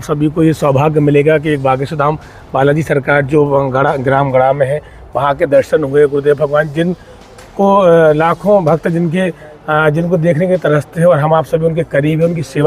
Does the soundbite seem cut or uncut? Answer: uncut